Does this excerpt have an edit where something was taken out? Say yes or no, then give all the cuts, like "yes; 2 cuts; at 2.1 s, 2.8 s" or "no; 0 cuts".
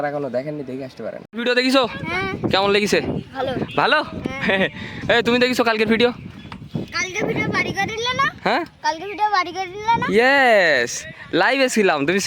yes; 1 cut; at 1.2 s